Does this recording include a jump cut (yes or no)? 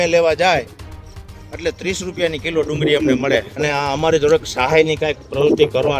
yes